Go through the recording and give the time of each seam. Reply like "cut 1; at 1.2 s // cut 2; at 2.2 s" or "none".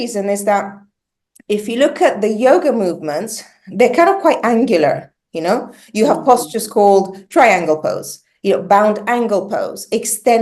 none